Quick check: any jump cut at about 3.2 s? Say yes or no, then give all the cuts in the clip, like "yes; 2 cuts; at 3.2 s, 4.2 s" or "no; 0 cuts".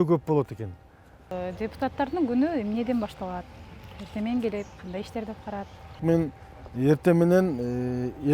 no; 2 cuts; at 1.4 s, 6.0 s